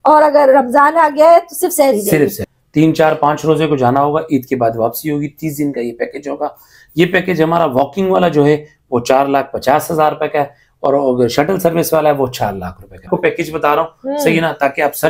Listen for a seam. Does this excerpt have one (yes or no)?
yes